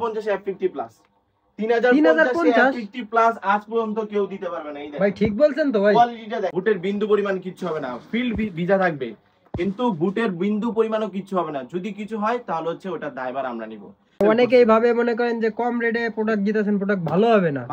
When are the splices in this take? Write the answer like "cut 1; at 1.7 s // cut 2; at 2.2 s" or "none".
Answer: cut 1; at 6.5 s // cut 2; at 14.2 s